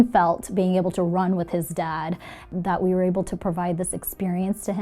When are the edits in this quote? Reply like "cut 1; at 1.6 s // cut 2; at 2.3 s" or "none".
cut 1; at 2.5 s